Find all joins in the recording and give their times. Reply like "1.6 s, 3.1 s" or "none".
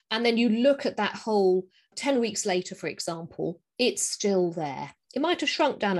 1.9 s